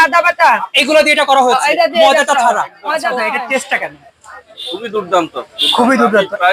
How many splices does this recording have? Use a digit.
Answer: 1